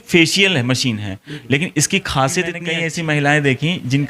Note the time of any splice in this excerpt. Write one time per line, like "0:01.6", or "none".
0:02.7